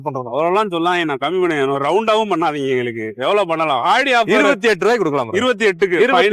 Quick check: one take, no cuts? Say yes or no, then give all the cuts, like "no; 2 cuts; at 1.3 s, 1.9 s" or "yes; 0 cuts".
yes; 0 cuts